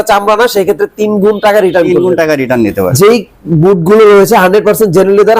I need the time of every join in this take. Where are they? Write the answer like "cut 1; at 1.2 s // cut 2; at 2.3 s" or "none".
cut 1; at 2.9 s